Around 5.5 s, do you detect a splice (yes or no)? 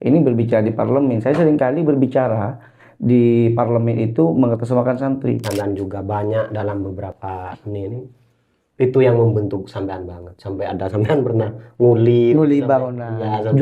yes